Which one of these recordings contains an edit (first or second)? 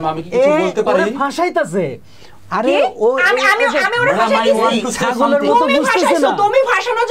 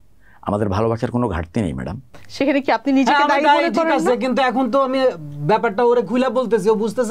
second